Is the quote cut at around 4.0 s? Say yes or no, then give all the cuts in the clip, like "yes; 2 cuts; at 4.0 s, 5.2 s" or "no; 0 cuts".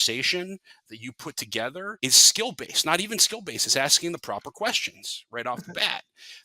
no; 1 cut; at 1.9 s